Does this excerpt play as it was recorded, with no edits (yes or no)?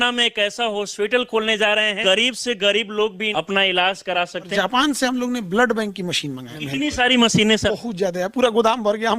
no